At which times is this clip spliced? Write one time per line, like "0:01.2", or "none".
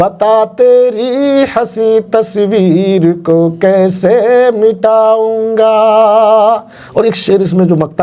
none